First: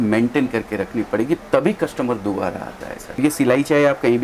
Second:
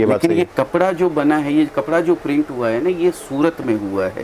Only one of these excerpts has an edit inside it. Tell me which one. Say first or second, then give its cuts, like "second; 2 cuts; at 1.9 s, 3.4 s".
first; 1 cut; at 3.2 s